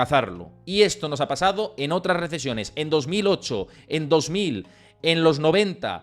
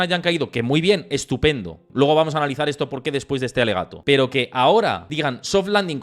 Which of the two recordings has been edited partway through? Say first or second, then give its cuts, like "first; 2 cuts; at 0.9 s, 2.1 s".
second; 3 cuts; at 1.8 s, 3.9 s, 5.0 s